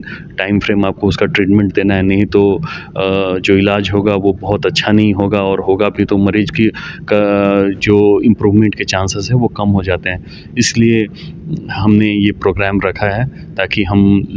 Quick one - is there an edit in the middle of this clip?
no; 0 cuts

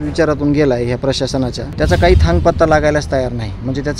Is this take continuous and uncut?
no; 1 cut; at 1.6 s

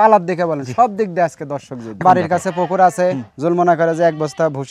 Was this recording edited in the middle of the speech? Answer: yes; 1 cut; at 1.9 s

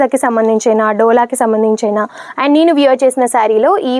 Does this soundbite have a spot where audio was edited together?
no; 0 cuts

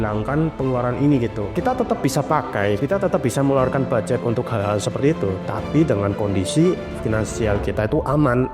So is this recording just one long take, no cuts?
no; 2 cuts; at 1.4 s, 2.8 s

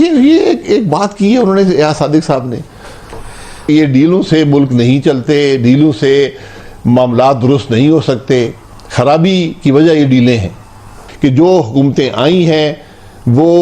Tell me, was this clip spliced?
yes; 2 cuts; at 3.5 s, 11.0 s

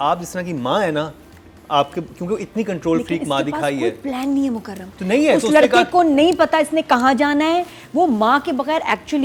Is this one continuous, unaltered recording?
yes; 0 cuts

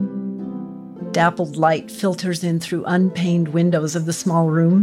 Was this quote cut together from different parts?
yes; 1 cut; at 0.9 s

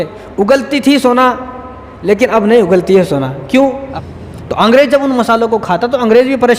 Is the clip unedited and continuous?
no; 1 cut; at 3.9 s

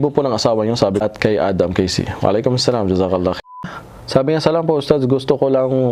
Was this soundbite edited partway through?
yes; 2 cuts; at 1.0 s, 3.6 s

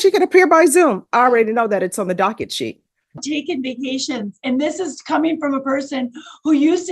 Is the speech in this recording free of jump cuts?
no; 1 cut; at 3.2 s

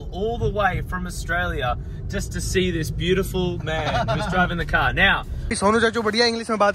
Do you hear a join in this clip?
yes; 1 cut; at 5.5 s

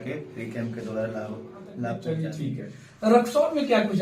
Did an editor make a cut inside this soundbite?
yes; 1 cut; at 2.0 s

